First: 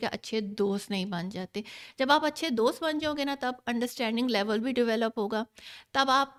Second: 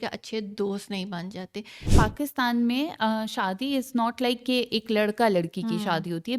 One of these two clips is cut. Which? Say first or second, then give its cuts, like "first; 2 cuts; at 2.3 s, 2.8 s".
second; 1 cut; at 1.9 s